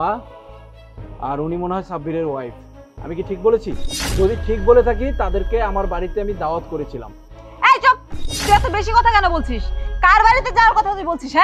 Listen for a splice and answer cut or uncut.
cut